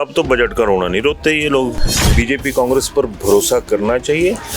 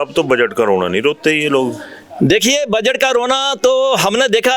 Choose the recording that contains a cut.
first; 1 cut; at 2.1 s

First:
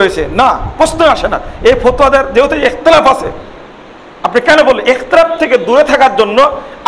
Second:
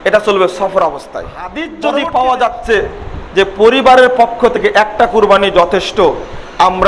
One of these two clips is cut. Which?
second; 1 cut; at 1.7 s

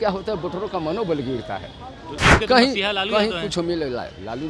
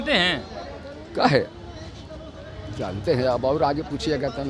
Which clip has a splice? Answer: first; 1 cut; at 2.2 s

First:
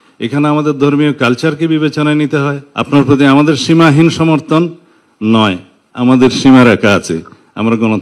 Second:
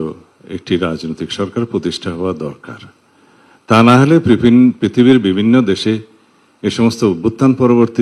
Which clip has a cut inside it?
first; 1 cut; at 2.7 s

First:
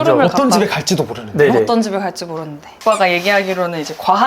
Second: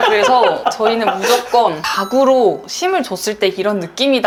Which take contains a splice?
first; 1 cut; at 2.7 s

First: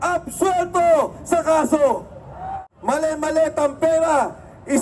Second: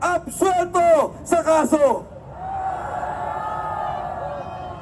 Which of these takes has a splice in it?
first; 1 cut; at 2.6 s

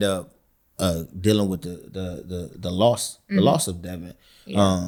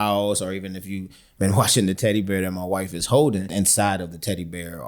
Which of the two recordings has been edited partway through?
second; 1 cut; at 3.5 s

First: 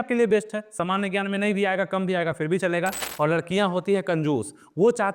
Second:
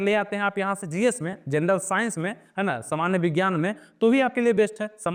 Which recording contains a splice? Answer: first; 1 cut; at 3.0 s

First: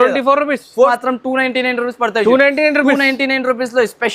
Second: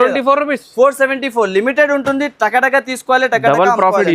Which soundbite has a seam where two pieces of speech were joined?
first; 1 cut; at 0.9 s

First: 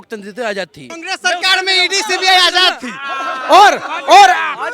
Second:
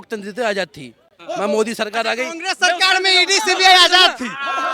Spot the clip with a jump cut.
first; 1 cut; at 1.0 s

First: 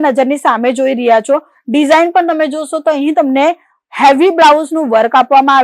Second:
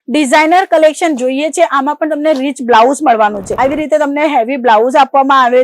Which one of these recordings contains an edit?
second; 1 cut; at 3.5 s

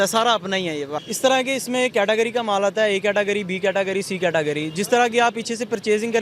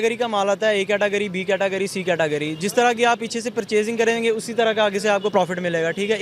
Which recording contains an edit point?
first; 1 cut; at 0.9 s

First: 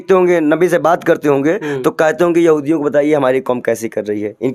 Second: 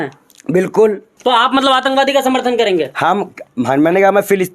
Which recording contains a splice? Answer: second; 1 cut; at 1.1 s

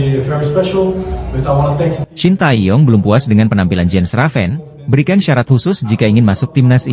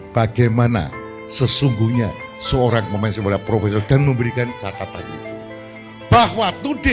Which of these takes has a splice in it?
first; 1 cut; at 2.1 s

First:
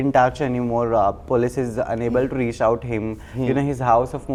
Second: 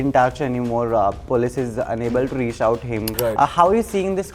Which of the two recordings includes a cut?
second; 1 cut; at 3.1 s

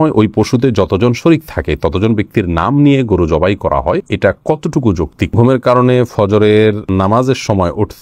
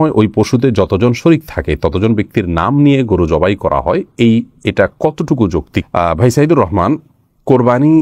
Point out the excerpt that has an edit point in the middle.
first; 3 cuts; at 4.1 s, 5.4 s, 6.8 s

